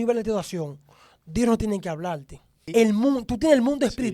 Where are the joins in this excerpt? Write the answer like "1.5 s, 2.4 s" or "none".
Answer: 2.6 s

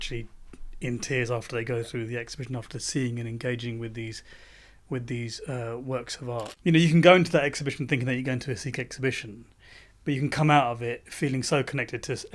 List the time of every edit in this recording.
6.5 s

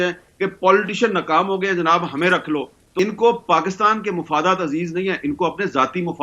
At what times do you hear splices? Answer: 2.8 s

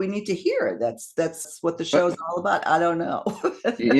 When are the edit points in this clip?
1.4 s

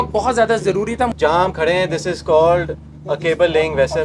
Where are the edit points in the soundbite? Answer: 1.1 s

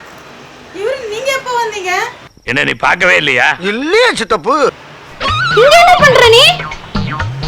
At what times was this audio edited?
none

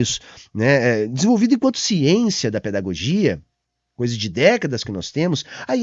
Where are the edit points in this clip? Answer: none

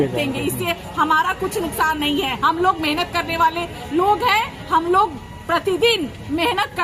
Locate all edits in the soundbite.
none

